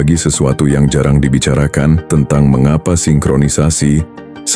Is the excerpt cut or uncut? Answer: cut